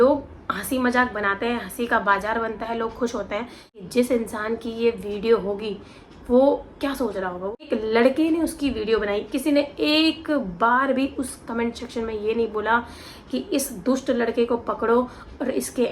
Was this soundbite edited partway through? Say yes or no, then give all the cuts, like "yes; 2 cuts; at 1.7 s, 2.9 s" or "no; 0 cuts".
yes; 2 cuts; at 3.8 s, 7.7 s